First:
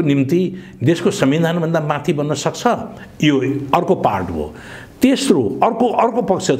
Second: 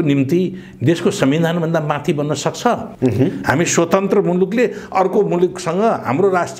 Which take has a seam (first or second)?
second